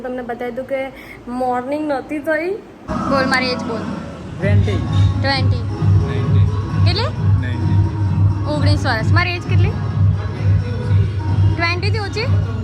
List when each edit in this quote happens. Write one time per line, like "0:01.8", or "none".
0:02.9